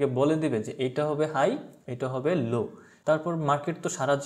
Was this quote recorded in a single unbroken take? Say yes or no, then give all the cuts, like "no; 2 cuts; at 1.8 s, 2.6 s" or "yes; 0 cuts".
no; 1 cut; at 2.9 s